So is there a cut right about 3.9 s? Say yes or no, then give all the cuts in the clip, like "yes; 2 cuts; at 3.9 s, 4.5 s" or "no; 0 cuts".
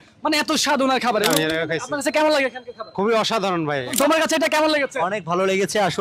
yes; 2 cuts; at 1.3 s, 3.9 s